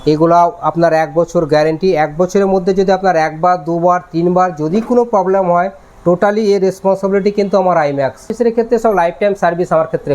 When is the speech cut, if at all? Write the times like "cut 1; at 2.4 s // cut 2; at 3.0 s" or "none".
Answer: cut 1; at 8.3 s